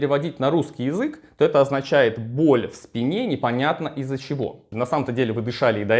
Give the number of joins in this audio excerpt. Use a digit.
1